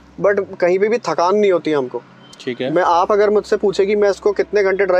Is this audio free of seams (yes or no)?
yes